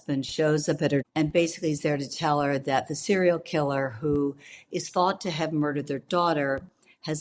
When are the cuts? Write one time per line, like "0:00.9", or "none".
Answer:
0:01.1

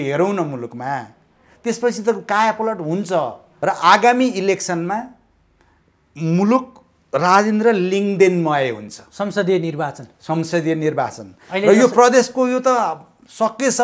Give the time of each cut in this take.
0:03.4

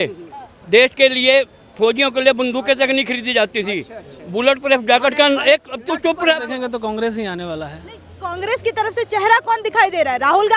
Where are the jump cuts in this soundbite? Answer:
0:06.5

